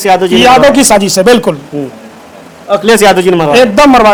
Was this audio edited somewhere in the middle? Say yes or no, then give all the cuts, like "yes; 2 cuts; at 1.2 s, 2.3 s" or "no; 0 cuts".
no; 0 cuts